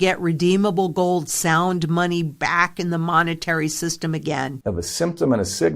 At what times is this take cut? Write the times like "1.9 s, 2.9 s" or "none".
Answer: 4.5 s